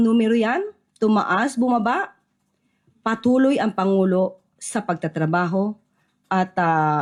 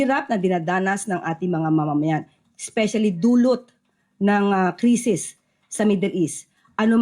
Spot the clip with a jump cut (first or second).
second